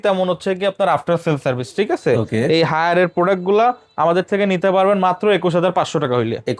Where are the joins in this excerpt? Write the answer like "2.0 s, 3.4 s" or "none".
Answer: none